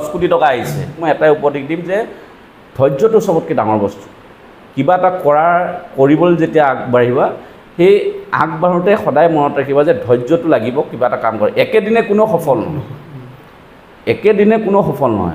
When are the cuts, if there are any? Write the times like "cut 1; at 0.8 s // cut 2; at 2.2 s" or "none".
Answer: cut 1; at 1.0 s